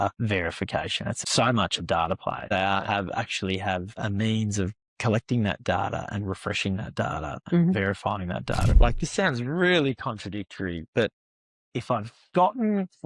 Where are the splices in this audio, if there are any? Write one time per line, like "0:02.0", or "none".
0:01.0
0:02.5
0:08.7